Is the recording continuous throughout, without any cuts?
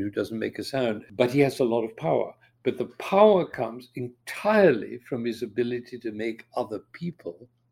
no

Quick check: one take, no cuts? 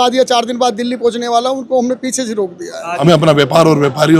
no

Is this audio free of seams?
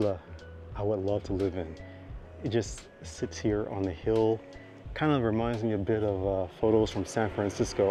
yes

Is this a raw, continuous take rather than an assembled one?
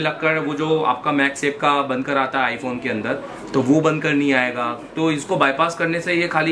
yes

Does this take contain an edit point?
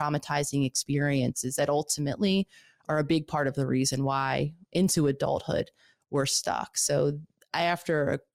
no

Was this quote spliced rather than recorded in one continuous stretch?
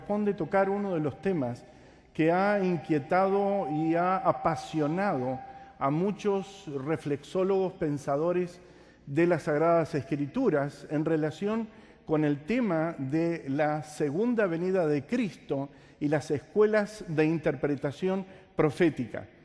no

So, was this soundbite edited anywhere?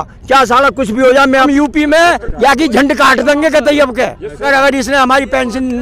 yes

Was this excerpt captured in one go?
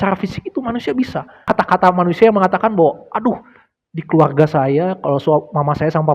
no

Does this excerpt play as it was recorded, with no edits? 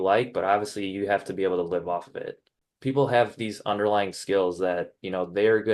no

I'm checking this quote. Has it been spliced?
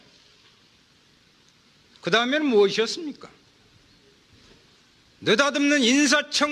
yes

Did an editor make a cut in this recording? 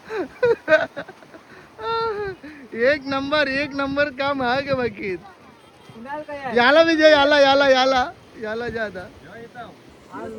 no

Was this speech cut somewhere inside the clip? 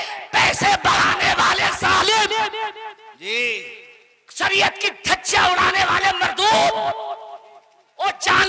no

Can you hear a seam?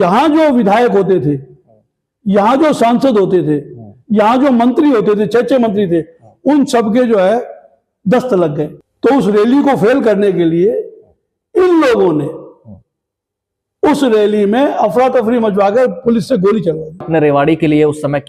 yes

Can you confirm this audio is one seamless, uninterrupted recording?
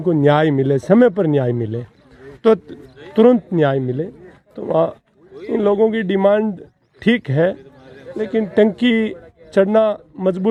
yes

